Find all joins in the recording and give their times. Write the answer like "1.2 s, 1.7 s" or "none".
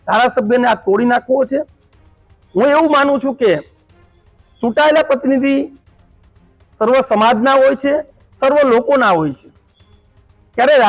none